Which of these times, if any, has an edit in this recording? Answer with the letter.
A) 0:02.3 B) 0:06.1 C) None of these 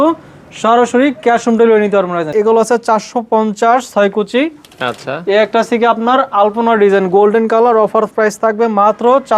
A